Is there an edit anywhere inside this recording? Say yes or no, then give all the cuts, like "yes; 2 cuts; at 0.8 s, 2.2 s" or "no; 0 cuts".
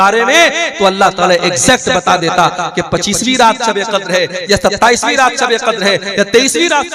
no; 0 cuts